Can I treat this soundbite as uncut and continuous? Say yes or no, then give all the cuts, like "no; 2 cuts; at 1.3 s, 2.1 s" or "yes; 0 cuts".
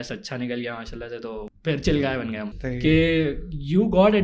no; 2 cuts; at 1.5 s, 2.5 s